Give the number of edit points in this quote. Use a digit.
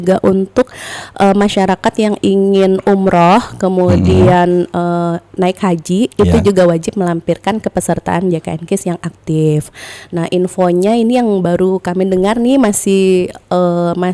0